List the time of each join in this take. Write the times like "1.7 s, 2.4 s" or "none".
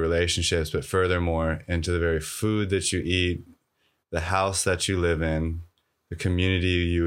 none

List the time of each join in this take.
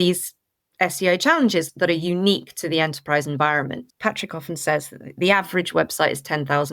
1.7 s, 3.8 s

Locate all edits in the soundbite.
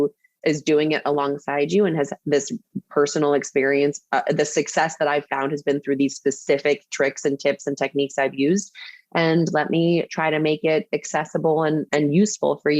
11.9 s

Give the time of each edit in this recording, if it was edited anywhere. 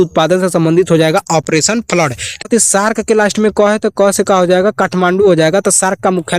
2.4 s

